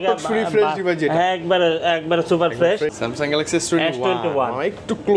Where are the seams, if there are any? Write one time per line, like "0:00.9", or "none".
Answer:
0:02.9